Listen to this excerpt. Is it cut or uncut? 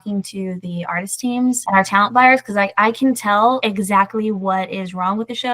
cut